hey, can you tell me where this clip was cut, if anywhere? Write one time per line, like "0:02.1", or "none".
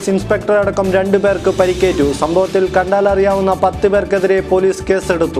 none